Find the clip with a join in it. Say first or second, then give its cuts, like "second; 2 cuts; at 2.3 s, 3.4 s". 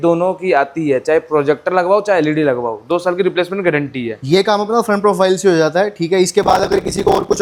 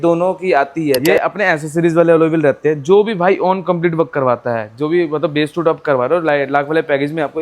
second; 1 cut; at 1.0 s